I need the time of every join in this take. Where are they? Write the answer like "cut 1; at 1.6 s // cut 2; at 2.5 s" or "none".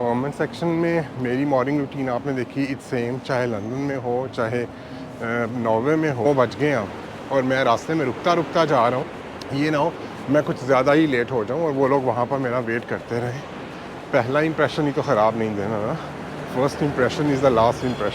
cut 1; at 6.3 s // cut 2; at 9.2 s // cut 3; at 13.6 s